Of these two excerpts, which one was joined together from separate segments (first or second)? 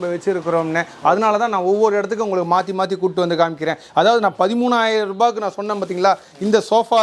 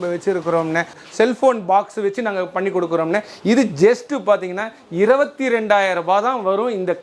second